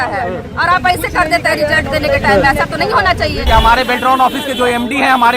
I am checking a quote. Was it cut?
yes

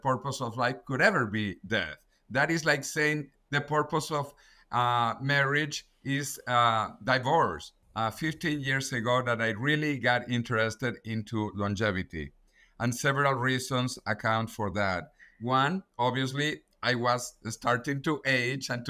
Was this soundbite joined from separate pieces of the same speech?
yes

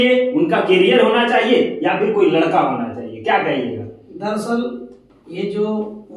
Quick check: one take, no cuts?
yes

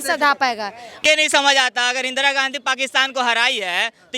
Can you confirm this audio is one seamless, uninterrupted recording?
no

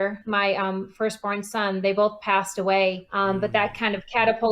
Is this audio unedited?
no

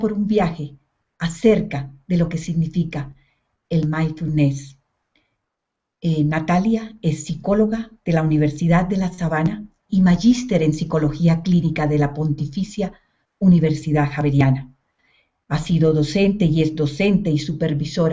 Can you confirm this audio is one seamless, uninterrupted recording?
yes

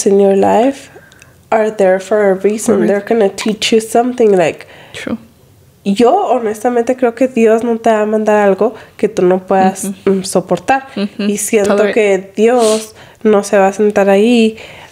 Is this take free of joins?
yes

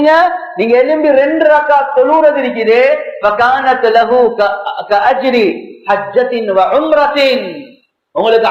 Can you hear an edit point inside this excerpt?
no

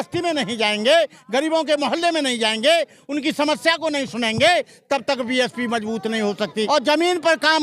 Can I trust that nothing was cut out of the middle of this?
no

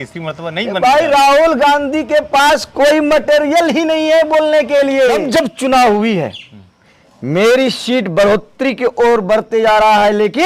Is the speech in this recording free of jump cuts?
no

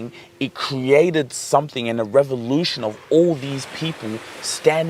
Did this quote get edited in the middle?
no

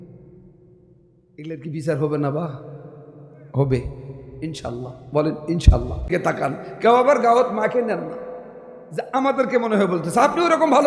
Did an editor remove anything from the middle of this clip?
yes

